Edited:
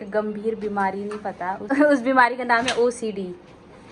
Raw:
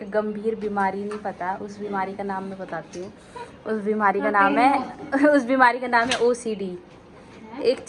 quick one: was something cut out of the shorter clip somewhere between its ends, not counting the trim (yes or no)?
yes